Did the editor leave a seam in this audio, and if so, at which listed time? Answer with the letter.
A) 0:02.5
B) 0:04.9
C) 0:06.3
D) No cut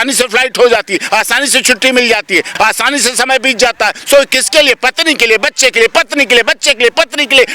A